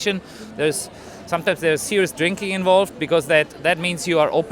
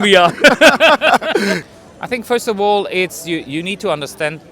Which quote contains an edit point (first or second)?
second